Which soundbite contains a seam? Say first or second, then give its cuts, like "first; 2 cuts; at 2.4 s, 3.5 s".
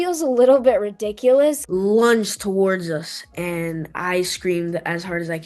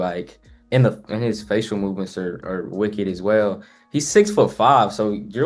first; 1 cut; at 1.6 s